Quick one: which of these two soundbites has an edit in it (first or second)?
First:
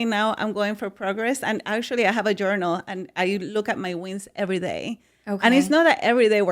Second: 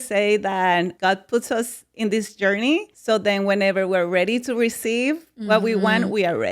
second